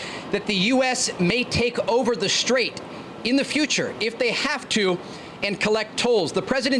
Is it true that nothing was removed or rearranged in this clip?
yes; 0 cuts

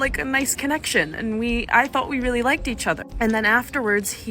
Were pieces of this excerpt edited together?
yes; 1 cut; at 3.0 s

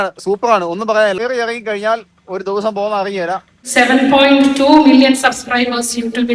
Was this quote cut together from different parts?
yes; 2 cuts; at 1.2 s, 3.6 s

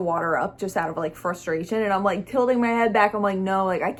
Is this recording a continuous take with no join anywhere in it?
yes; 0 cuts

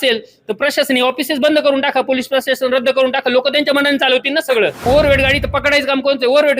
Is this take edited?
yes; 1 cut; at 4.8 s

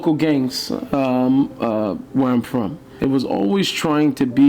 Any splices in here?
yes; 1 cut; at 2.8 s

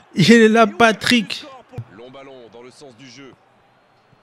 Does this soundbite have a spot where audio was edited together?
yes; 1 cut; at 1.8 s

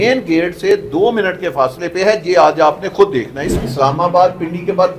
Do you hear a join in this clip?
yes; 1 cut; at 3.6 s

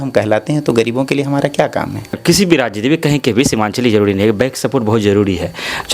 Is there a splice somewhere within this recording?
yes; 1 cut; at 2.2 s

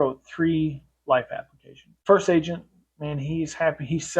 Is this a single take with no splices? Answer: no; 1 cut; at 2.0 s

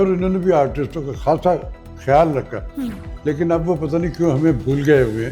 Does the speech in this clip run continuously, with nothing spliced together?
yes; 0 cuts

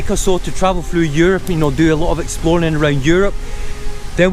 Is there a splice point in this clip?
no; 0 cuts

